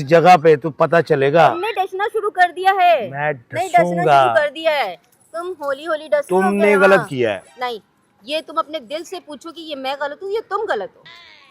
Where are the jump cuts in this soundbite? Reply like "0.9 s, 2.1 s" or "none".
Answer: none